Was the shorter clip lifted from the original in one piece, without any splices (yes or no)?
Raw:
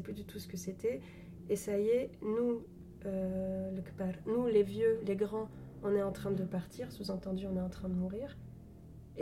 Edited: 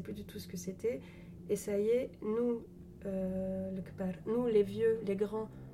yes